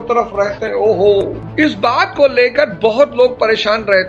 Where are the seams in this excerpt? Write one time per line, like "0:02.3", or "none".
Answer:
0:01.4